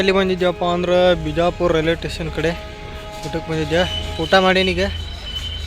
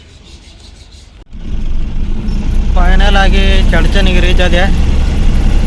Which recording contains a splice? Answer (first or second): second